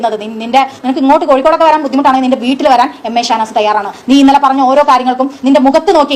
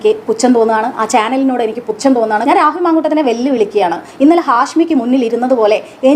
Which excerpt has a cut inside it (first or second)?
second